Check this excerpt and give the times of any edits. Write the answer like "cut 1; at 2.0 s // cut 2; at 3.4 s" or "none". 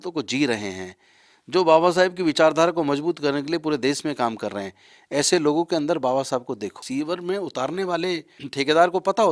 cut 1; at 6.8 s // cut 2; at 8.4 s

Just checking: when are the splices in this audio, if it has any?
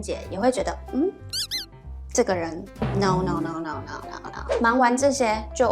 cut 1; at 4.5 s

